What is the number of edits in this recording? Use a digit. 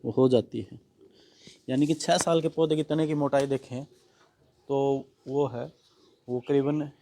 0